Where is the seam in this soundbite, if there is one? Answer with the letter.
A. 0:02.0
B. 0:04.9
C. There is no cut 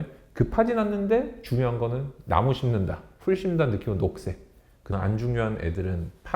B